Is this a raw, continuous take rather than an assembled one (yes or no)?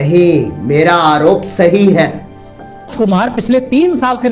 no